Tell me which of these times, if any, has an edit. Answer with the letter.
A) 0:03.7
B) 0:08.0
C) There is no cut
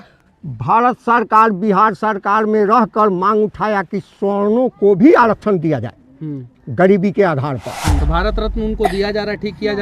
B